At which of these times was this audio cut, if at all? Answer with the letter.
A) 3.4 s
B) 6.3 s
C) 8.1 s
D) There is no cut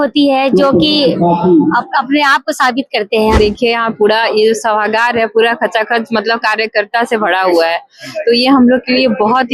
A